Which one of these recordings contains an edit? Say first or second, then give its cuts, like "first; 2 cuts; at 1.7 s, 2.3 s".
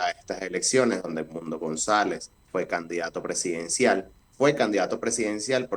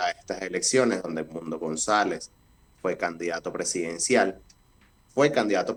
first; 2 cuts; at 2.3 s, 4.2 s